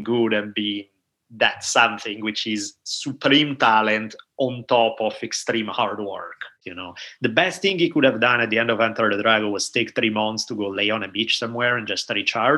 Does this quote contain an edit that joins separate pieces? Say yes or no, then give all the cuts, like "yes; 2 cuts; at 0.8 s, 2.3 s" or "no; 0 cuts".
yes; 1 cut; at 6.5 s